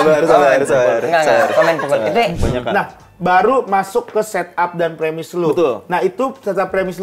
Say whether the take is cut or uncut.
cut